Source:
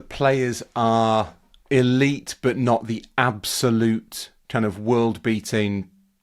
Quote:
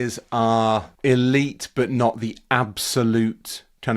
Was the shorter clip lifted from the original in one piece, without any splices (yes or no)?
no